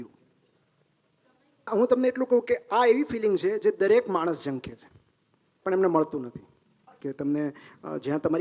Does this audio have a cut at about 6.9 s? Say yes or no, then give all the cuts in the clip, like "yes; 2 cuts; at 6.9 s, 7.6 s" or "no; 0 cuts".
yes; 2 cuts; at 1.7 s, 6.9 s